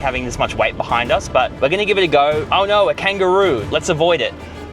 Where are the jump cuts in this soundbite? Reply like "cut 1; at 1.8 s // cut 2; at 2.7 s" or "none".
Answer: cut 1; at 1.5 s // cut 2; at 2.4 s